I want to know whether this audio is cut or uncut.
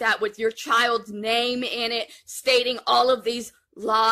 uncut